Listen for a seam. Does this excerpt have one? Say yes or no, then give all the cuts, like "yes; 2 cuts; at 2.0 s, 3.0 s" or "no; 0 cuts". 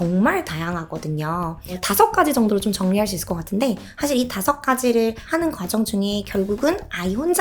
yes; 3 cuts; at 1.8 s, 3.9 s, 5.2 s